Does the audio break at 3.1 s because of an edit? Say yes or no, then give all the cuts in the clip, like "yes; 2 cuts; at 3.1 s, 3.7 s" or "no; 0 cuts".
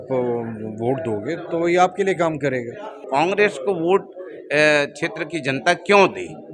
yes; 1 cut; at 3.1 s